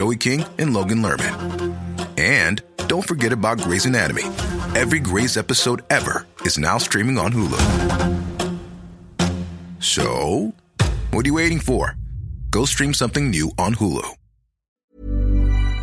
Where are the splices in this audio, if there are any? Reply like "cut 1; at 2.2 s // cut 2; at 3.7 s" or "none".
cut 1; at 14.6 s